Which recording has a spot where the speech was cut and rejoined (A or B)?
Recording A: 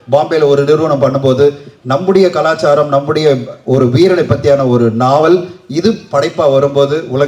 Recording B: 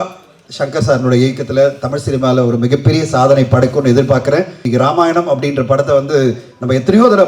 B